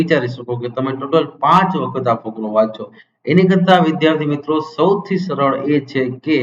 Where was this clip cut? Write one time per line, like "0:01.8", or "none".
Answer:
none